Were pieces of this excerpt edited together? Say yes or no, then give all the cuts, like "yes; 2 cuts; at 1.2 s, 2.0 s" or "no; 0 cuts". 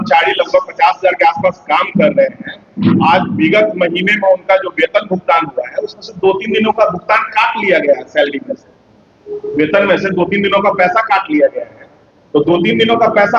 no; 0 cuts